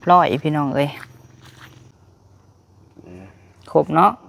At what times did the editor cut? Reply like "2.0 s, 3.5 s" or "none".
1.9 s